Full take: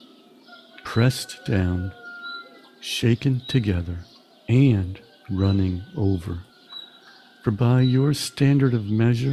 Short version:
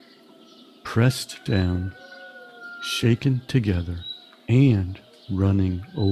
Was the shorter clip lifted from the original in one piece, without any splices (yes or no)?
yes